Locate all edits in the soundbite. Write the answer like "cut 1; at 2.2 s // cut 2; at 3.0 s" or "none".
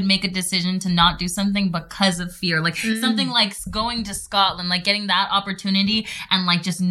cut 1; at 3.6 s